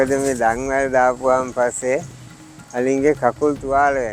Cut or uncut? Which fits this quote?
uncut